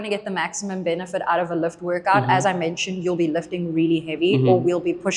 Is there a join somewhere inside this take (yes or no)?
no